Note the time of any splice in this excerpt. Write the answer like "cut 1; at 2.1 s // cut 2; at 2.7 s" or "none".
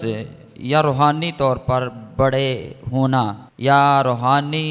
cut 1; at 3.5 s